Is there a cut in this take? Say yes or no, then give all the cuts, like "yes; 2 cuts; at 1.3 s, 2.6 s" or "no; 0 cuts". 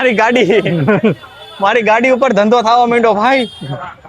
no; 0 cuts